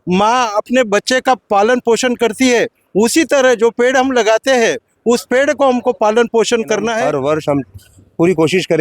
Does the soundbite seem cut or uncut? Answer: cut